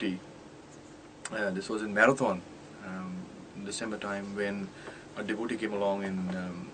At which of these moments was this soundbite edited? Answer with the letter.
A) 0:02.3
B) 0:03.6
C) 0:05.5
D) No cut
C